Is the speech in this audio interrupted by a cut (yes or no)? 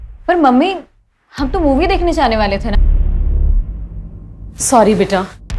yes